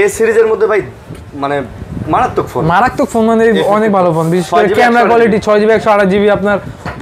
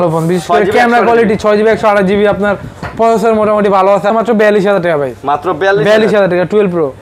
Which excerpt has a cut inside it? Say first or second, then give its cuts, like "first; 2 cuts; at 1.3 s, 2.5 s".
second; 1 cut; at 4.1 s